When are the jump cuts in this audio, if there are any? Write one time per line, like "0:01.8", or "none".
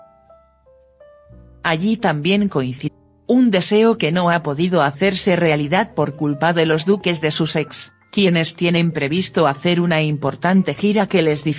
none